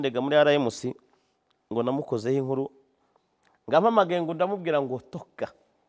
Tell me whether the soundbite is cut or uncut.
uncut